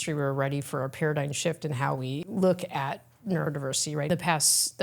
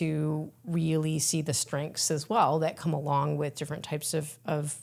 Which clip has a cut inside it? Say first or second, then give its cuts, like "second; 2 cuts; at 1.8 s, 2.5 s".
first; 2 cuts; at 2.2 s, 4.1 s